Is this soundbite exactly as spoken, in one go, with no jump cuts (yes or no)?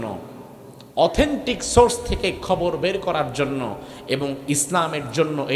yes